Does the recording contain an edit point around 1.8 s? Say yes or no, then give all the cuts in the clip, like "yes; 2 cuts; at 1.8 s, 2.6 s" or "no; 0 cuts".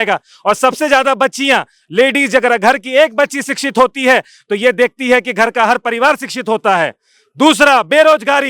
no; 0 cuts